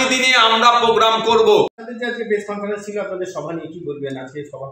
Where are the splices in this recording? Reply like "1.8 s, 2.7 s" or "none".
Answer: 1.8 s